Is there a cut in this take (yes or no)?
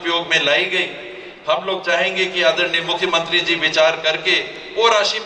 no